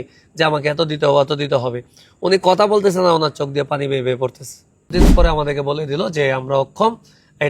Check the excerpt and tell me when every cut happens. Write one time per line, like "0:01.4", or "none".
0:04.9